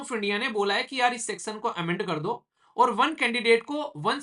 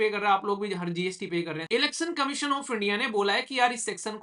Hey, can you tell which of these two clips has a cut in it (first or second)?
second